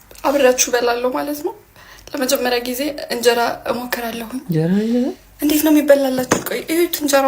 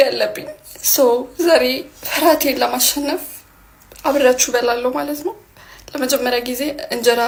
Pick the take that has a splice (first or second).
first